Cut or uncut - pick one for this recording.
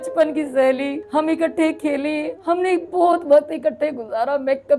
cut